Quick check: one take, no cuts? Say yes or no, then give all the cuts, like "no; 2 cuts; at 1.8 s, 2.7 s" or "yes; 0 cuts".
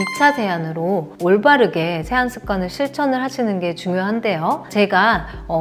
yes; 0 cuts